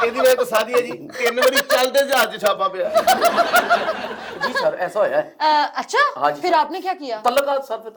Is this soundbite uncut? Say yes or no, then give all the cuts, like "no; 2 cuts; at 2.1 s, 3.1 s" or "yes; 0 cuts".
yes; 0 cuts